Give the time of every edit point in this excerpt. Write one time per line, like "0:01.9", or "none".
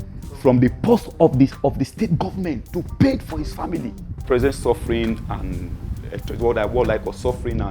0:04.1